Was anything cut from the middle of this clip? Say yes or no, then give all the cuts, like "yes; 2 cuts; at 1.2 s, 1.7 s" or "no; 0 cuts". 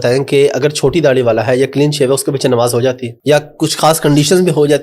yes; 1 cut; at 3.1 s